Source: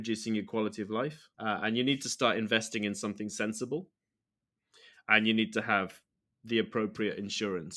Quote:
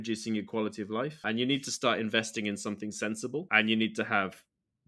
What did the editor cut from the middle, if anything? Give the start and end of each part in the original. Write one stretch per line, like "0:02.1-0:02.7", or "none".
0:01.2-0:01.6
0:03.8-0:05.0